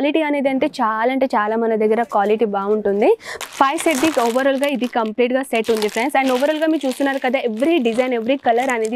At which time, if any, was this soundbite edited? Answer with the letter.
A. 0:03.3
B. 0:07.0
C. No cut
A